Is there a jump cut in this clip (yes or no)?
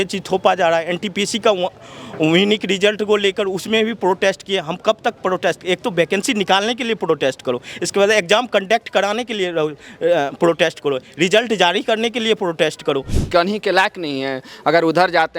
yes